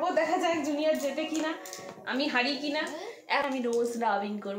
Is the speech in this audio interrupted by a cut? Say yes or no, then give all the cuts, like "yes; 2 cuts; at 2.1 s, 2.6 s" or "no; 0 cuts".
yes; 1 cut; at 3.4 s